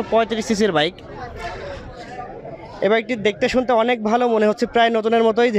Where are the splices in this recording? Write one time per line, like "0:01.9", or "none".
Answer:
none